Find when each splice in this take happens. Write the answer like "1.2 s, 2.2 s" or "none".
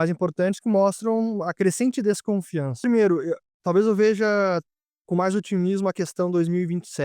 2.8 s